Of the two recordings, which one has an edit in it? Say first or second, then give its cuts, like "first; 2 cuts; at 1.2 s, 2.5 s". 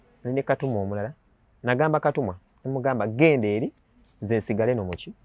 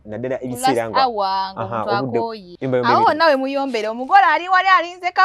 second; 1 cut; at 2.5 s